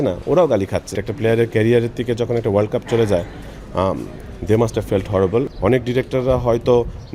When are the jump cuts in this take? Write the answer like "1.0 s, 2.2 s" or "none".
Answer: 1.0 s, 5.5 s